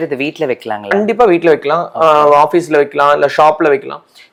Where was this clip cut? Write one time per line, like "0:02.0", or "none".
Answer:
none